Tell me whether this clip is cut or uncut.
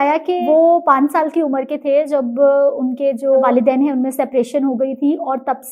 cut